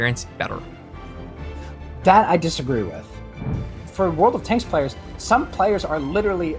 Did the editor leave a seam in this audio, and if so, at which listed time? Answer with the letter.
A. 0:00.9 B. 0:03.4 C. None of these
B